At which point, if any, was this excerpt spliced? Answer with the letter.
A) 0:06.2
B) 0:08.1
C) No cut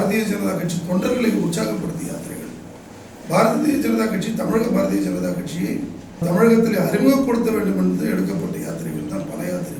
A